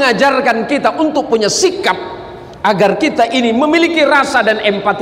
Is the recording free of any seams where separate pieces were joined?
yes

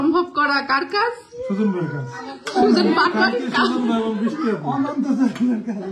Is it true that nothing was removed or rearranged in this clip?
yes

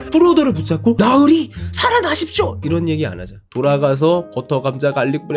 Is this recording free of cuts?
yes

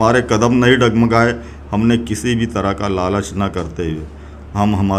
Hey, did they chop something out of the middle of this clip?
no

